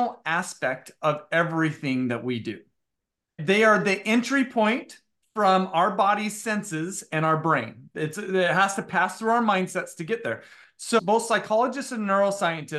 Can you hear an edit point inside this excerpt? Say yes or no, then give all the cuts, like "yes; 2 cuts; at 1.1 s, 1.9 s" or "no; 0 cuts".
yes; 2 cuts; at 3.4 s, 11.0 s